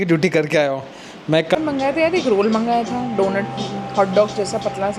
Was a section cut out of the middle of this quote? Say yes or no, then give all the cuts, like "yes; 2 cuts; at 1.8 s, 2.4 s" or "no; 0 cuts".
yes; 1 cut; at 1.6 s